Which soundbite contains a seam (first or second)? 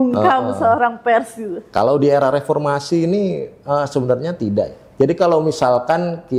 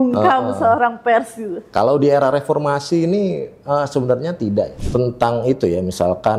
second